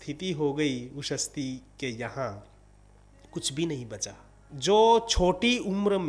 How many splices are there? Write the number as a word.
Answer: one